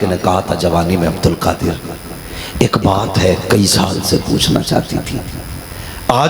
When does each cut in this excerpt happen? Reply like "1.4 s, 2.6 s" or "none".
none